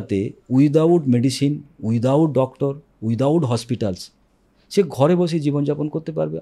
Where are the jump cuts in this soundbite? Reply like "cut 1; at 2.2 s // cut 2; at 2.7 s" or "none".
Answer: none